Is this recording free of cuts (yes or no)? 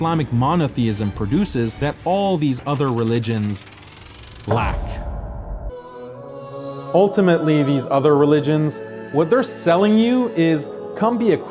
no